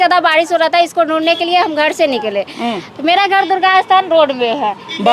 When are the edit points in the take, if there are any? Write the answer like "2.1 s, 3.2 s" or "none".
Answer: none